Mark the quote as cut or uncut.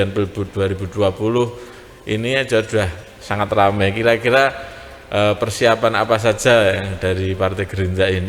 uncut